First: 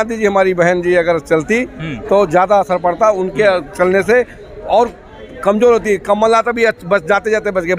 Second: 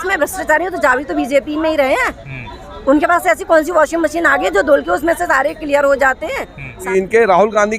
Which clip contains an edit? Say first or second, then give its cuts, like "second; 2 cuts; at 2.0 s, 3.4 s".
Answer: second; 1 cut; at 6.8 s